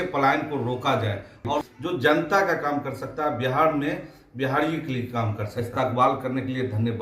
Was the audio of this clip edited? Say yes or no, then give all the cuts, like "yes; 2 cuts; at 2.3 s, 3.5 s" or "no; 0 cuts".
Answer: yes; 2 cuts; at 1.6 s, 5.4 s